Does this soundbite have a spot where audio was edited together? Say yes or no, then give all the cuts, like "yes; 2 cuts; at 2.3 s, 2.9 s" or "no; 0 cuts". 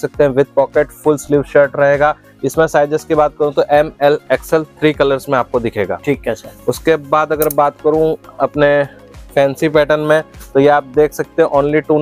no; 0 cuts